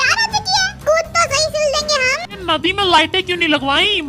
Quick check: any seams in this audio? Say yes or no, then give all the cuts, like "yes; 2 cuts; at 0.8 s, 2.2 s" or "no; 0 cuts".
yes; 1 cut; at 2.2 s